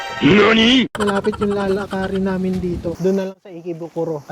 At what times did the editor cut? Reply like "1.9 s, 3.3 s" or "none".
0.9 s, 3.0 s